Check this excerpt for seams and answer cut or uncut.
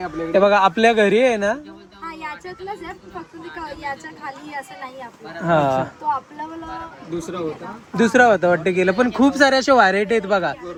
uncut